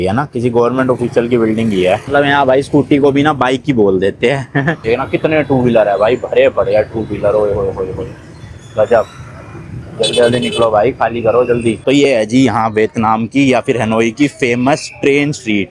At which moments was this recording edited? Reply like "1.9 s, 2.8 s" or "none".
2.0 s, 4.8 s, 11.8 s